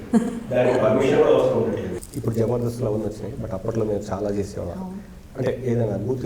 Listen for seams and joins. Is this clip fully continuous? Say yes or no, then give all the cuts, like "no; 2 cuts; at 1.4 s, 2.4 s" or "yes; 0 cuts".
no; 1 cut; at 2.0 s